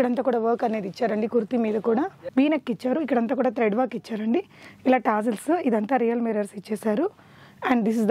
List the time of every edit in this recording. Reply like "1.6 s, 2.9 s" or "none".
2.2 s

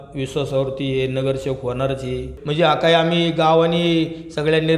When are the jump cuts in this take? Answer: 2.4 s

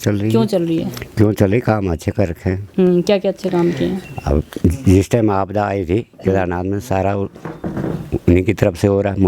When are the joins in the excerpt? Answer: none

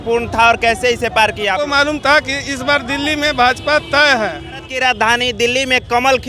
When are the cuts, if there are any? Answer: 1.7 s, 4.7 s

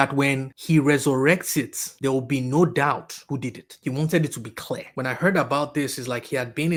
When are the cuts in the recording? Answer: none

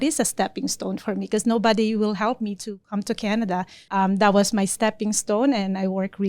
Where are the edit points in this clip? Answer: 3.8 s

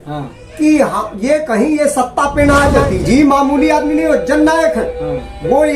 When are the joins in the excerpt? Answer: 2.8 s

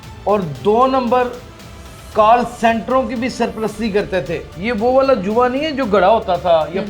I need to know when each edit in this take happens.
4.5 s

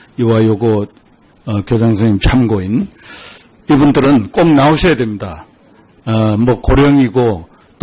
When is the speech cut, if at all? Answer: none

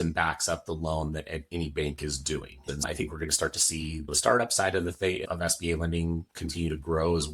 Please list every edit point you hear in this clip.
2.6 s

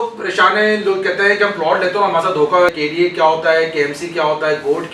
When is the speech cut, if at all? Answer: 2.7 s

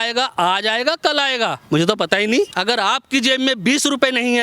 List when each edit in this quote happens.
2.5 s

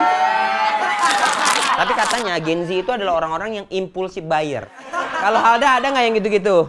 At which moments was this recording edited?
1.7 s, 4.7 s

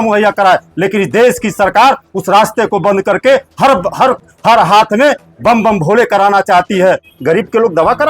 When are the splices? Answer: 7.1 s

